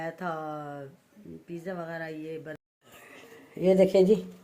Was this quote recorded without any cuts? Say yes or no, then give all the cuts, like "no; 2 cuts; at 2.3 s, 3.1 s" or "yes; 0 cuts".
no; 1 cut; at 2.6 s